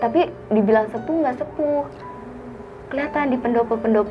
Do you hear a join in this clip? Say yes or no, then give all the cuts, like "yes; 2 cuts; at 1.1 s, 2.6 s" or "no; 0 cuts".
no; 0 cuts